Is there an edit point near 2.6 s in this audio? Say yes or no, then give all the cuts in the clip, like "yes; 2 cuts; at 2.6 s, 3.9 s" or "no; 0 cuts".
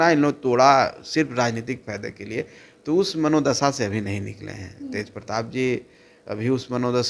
no; 0 cuts